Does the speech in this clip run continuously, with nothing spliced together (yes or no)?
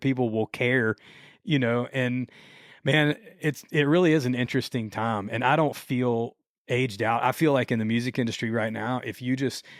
yes